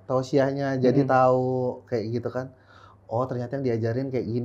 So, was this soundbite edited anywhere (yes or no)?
no